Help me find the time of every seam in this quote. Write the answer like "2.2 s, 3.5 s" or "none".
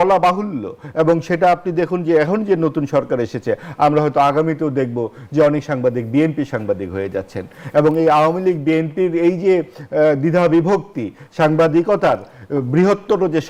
none